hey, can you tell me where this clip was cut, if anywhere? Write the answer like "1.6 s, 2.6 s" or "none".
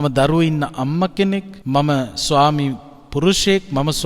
1.5 s